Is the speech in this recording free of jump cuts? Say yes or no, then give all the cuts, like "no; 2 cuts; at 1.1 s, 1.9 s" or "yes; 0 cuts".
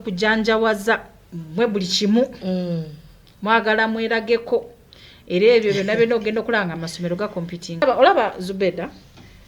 no; 1 cut; at 7.8 s